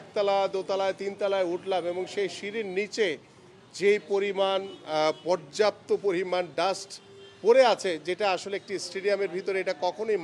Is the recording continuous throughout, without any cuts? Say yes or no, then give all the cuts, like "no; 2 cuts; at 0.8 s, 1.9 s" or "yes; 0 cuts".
yes; 0 cuts